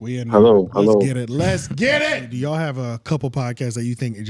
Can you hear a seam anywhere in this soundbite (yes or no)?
yes